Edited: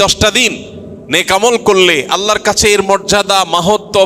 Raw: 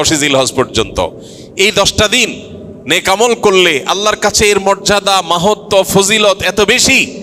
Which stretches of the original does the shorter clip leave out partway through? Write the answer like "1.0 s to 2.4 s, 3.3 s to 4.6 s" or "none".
none